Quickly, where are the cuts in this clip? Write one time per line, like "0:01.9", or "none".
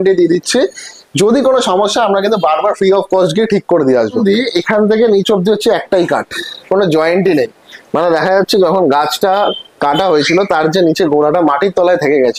0:04.2